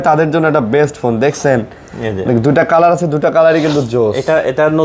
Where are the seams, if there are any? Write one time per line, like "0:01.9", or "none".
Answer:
none